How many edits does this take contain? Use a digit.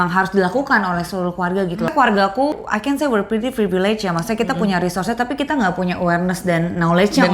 2